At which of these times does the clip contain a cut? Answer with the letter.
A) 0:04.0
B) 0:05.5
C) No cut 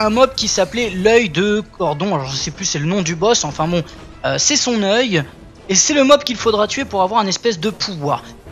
C